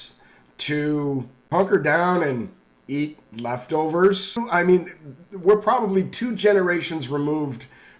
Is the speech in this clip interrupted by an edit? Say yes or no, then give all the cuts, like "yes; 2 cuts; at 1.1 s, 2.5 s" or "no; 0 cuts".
yes; 2 cuts; at 1.4 s, 4.4 s